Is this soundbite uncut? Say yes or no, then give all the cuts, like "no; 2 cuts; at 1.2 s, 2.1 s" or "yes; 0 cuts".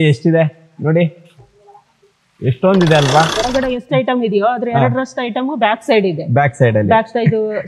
no; 1 cut; at 3.4 s